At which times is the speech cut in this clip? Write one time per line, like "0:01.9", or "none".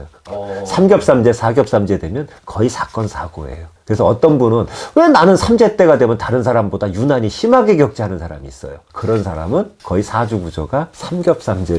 none